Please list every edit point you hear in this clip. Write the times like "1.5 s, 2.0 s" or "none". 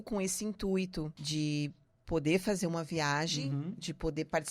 1.2 s